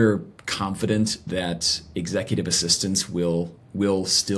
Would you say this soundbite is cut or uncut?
uncut